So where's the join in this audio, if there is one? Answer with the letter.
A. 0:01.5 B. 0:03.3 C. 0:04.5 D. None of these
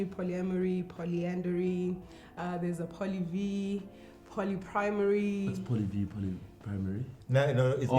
D